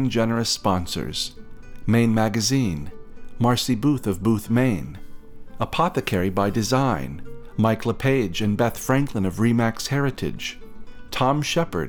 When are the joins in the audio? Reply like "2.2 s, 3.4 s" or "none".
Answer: none